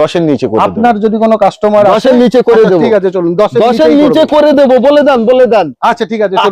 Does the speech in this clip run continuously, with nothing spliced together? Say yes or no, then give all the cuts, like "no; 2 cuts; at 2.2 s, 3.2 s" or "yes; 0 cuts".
yes; 0 cuts